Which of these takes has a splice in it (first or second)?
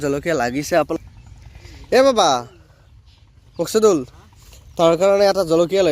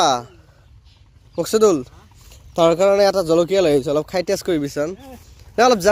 first